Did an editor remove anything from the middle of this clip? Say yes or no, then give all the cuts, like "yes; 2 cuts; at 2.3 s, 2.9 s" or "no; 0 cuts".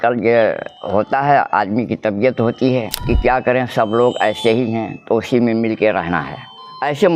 yes; 1 cut; at 2.9 s